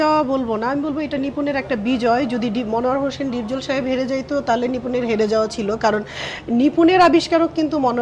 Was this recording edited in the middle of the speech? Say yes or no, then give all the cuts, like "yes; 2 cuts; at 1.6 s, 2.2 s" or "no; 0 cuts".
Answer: no; 0 cuts